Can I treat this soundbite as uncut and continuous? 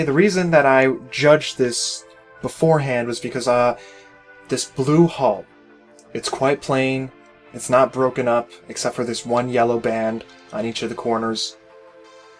yes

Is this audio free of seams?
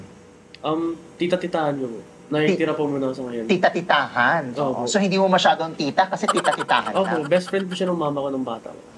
yes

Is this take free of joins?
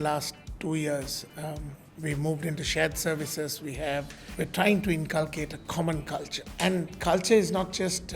no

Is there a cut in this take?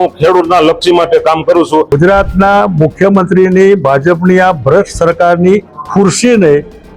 yes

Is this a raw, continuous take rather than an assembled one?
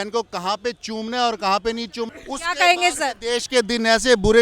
no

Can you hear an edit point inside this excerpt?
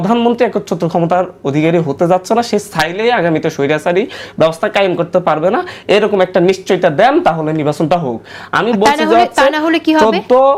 no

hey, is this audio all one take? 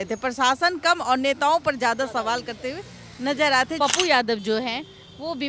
no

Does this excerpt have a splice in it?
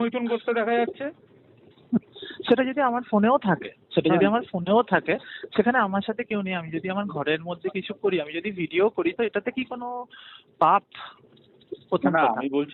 no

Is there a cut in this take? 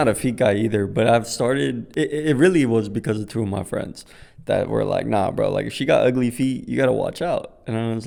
no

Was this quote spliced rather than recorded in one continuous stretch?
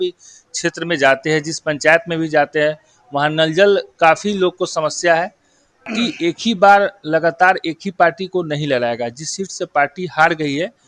yes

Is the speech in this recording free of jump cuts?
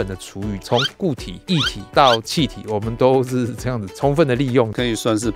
yes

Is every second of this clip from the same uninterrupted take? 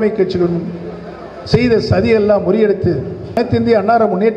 no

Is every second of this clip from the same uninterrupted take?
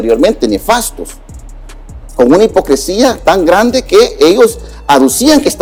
yes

